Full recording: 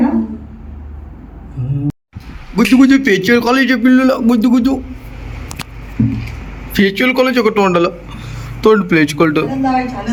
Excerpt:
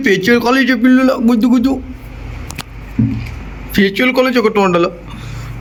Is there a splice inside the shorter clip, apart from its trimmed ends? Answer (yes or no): no